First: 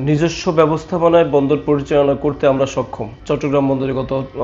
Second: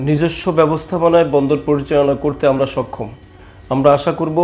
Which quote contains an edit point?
first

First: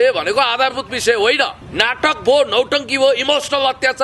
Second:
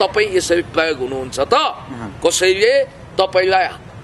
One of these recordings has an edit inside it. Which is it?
first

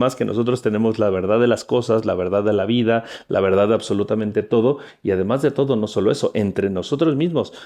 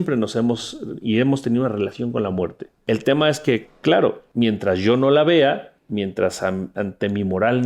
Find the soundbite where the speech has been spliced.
second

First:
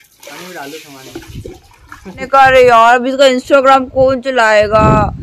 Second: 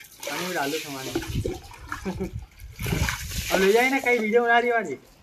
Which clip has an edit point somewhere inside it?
first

